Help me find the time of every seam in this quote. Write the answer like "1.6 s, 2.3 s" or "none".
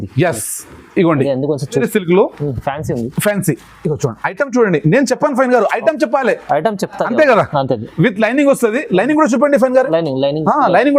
1.8 s